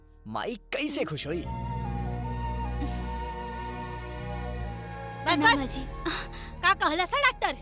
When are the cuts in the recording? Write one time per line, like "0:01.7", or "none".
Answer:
0:01.5